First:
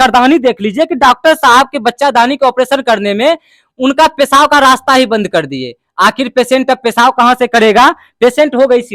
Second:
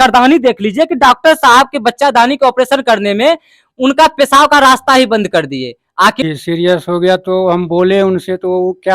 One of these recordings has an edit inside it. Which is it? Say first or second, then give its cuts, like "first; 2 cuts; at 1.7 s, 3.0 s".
second; 1 cut; at 6.2 s